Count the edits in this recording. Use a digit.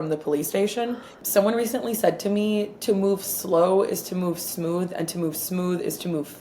1